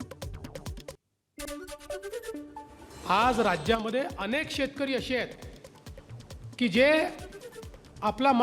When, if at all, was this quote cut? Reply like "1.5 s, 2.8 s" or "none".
1.0 s, 2.9 s